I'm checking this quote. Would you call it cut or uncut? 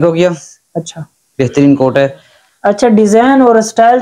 uncut